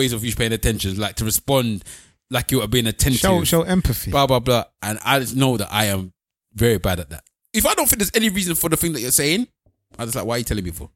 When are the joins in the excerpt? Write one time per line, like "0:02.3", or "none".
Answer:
0:07.4